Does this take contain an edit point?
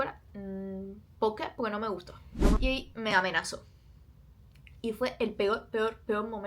yes; 1 cut; at 2.6 s

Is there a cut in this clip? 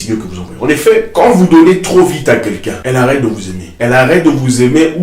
yes; 3 cuts; at 1.1 s, 2.7 s, 3.6 s

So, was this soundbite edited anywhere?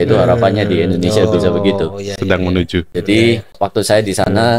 yes; 2 cuts; at 2.9 s, 3.6 s

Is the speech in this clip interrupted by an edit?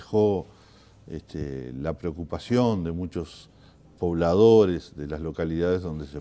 no; 0 cuts

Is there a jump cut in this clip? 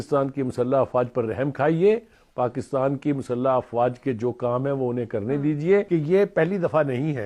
yes; 1 cut; at 5.9 s

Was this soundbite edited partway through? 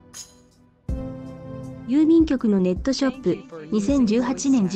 yes; 1 cut; at 1.8 s

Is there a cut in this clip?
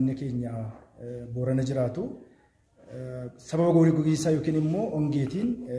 no; 0 cuts

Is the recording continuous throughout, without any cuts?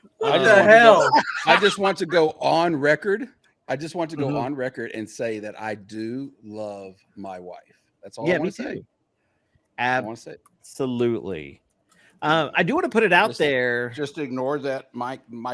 yes; 0 cuts

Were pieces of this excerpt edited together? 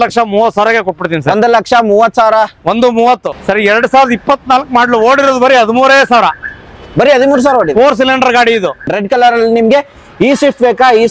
yes; 2 cuts; at 3.3 s, 8.9 s

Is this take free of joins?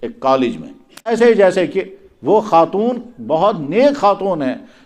no; 1 cut; at 1.1 s

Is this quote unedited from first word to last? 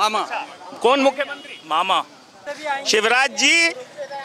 yes; 0 cuts

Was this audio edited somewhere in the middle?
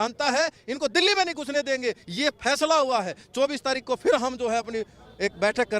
no; 0 cuts

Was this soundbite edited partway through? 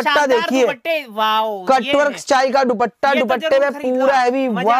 no; 0 cuts

